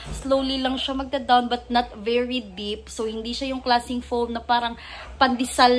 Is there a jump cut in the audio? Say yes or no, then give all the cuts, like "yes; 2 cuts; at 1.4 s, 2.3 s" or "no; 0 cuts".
no; 0 cuts